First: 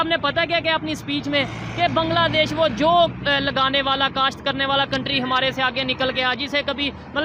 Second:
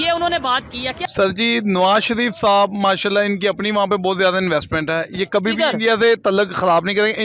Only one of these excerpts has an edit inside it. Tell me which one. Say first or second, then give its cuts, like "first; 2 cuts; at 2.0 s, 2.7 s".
second; 1 cut; at 1.0 s